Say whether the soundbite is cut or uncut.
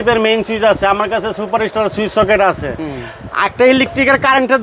uncut